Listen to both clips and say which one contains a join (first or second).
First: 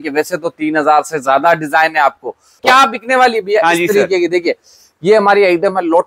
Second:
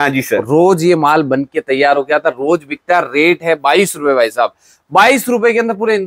first